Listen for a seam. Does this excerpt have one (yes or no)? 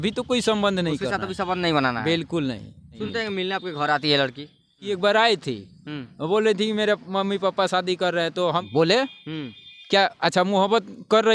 yes